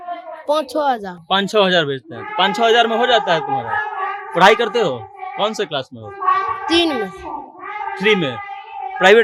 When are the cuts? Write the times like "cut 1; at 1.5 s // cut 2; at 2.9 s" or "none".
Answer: none

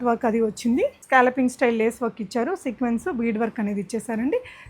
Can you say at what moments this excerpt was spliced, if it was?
cut 1; at 1.0 s

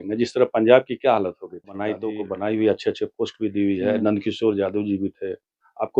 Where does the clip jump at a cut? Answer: cut 1; at 1.8 s

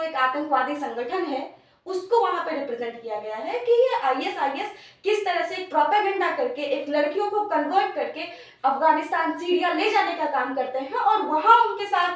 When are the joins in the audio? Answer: none

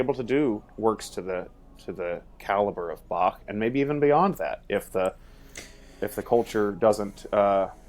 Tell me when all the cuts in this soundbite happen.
none

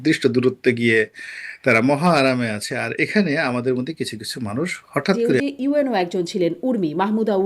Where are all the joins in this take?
cut 1; at 5.4 s

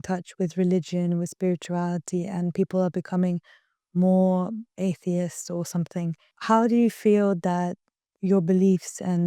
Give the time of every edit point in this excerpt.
cut 1; at 4.7 s // cut 2; at 6.3 s

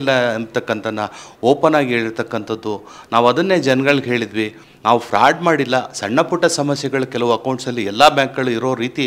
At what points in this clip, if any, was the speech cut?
none

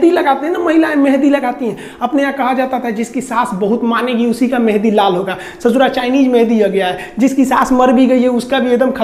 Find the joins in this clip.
none

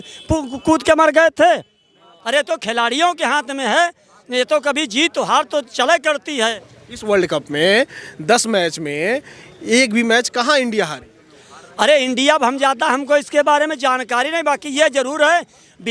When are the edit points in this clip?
none

